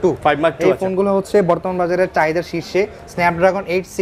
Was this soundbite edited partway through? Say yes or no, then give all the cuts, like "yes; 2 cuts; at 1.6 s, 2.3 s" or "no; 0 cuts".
no; 0 cuts